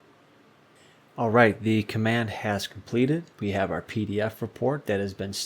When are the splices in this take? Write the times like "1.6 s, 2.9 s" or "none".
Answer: 0.8 s, 3.3 s